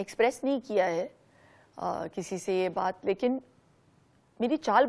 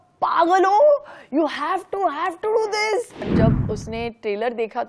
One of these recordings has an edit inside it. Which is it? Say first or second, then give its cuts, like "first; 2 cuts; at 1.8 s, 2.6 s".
second; 1 cut; at 3.3 s